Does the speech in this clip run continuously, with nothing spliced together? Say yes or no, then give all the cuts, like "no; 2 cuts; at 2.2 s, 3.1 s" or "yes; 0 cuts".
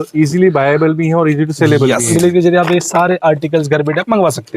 no; 1 cut; at 2.1 s